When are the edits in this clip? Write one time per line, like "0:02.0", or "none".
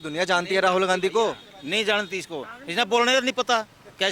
none